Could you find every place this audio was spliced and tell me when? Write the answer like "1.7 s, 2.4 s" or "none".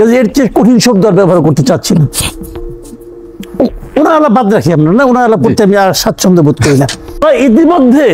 2.3 s, 3.6 s, 7.0 s

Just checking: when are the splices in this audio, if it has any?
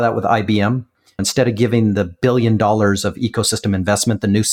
0.9 s

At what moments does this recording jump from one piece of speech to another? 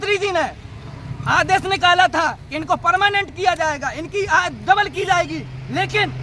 none

